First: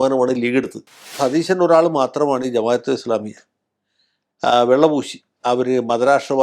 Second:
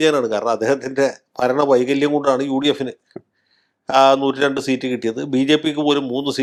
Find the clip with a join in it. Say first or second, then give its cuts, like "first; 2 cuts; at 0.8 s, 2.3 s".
first; 1 cut; at 1.1 s